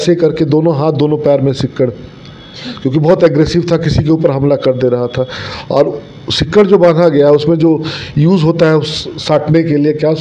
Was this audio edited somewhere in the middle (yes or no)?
no